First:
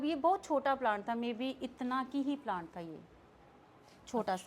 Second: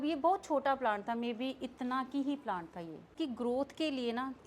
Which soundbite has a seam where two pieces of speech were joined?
second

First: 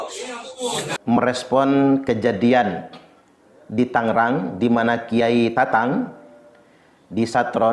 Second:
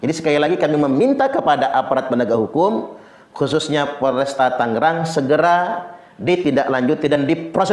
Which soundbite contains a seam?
first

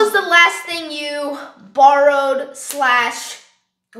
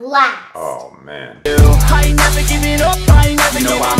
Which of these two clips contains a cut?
second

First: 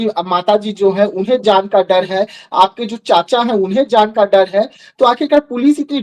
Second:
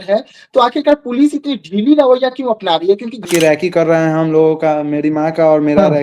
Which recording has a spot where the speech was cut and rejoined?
second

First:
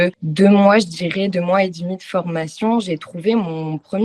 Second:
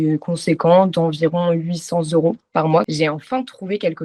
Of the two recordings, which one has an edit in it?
second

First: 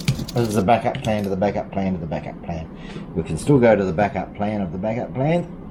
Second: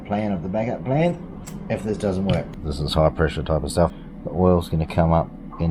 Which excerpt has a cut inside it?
second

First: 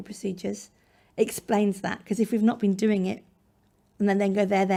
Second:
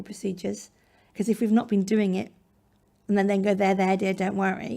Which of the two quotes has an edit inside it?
second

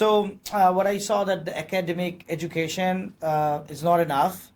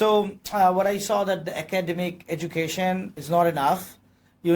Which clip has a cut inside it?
second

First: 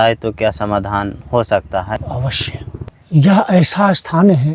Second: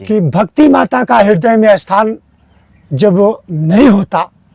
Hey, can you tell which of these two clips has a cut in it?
first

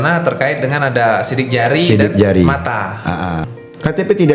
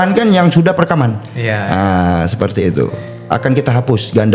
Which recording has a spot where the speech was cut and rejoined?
first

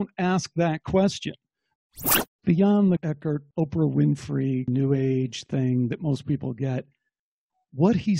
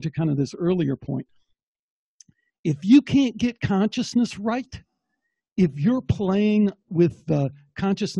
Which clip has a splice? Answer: first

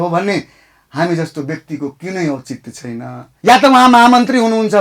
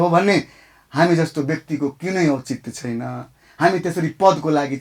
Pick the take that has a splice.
first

